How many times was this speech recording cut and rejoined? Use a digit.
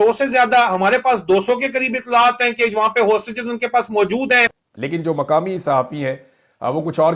0